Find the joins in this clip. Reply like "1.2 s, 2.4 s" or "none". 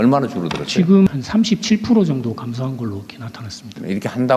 1.1 s